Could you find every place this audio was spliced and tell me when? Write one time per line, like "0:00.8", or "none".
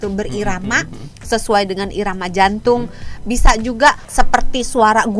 0:04.0